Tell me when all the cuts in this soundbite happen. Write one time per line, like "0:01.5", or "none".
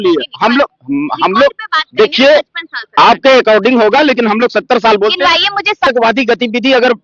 0:05.9